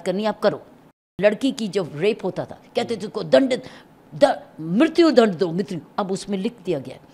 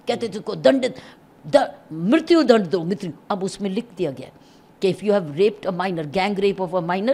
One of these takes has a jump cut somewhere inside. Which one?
first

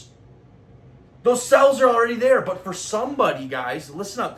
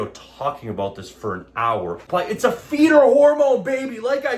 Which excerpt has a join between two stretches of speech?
second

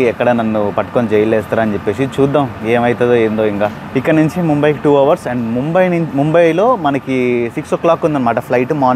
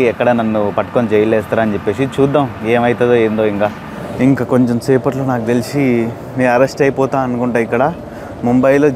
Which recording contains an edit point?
second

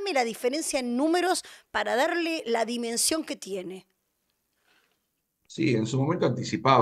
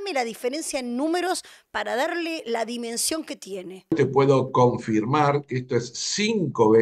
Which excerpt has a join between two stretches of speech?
second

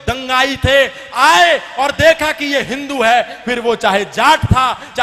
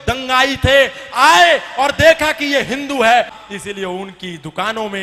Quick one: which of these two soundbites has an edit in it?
second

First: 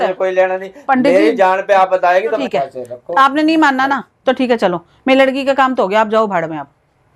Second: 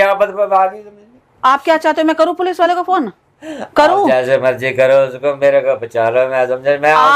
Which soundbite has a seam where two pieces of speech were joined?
first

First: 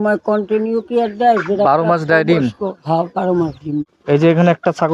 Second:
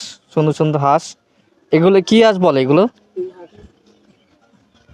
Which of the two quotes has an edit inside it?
first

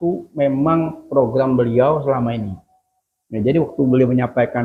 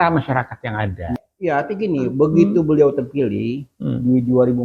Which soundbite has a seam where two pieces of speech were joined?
second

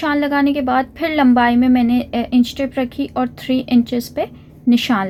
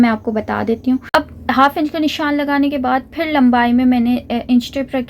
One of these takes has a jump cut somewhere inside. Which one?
second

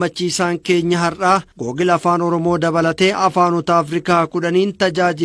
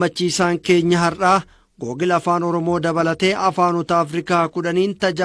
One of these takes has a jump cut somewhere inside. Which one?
first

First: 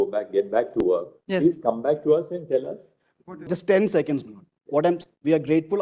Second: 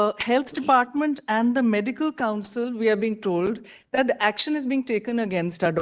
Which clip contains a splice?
first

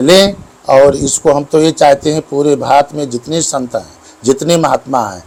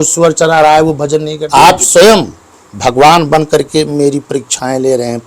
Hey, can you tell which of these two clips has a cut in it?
second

